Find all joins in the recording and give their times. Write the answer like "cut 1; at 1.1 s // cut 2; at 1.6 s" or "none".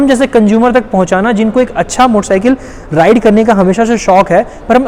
none